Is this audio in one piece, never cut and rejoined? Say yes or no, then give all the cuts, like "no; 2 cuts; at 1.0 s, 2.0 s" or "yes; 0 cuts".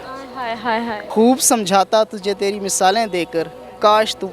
no; 1 cut; at 1.0 s